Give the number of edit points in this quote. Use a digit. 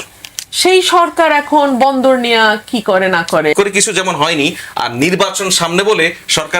1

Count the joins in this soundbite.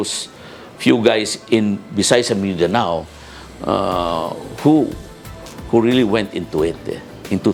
0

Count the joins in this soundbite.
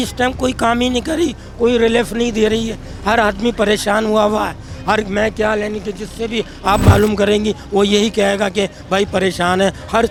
0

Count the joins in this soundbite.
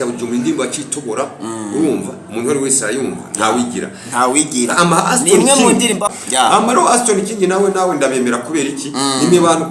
1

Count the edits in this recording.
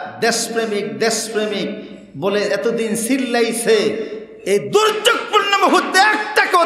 0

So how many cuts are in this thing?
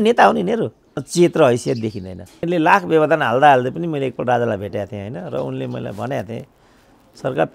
2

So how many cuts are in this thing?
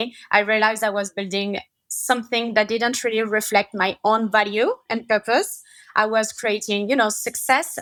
0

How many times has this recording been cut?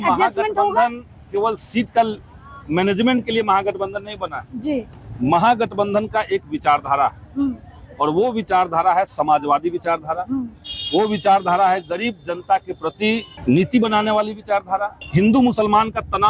2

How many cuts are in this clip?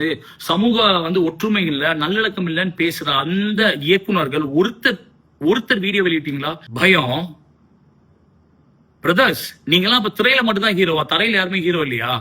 1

